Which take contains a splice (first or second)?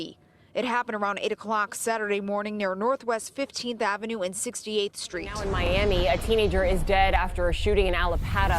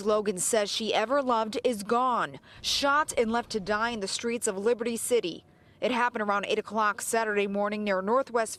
first